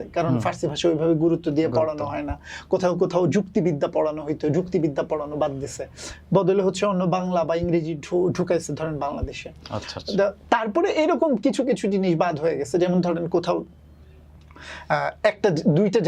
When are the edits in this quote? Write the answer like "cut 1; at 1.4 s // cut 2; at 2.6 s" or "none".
none